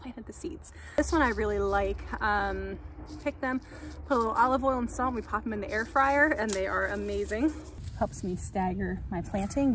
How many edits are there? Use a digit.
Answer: 2